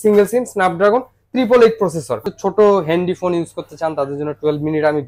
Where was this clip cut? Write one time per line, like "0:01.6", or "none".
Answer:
0:02.3

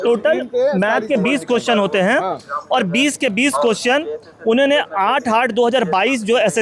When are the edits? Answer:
none

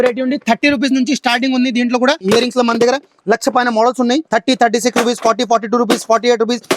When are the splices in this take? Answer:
0:02.2
0:04.3

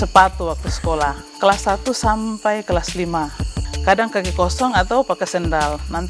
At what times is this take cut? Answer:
0:01.3
0:03.5

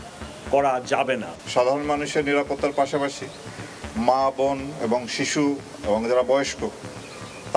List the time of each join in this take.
0:01.4

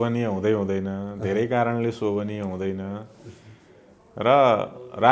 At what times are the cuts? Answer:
none

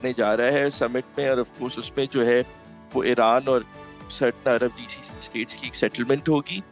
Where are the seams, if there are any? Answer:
none

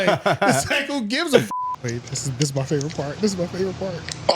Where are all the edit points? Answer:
0:01.5

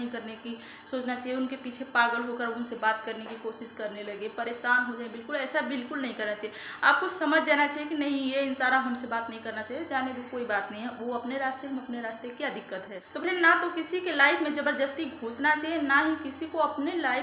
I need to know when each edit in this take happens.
0:13.0

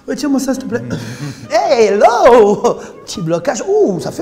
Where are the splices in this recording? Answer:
0:01.4

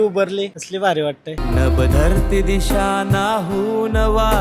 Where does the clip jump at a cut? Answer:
0:01.4

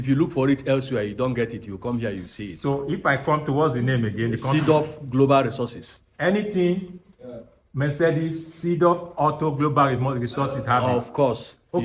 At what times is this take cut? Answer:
none

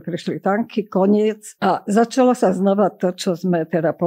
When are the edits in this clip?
0:01.5

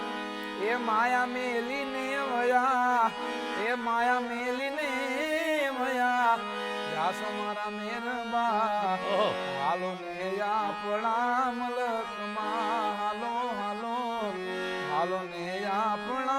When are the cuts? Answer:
none

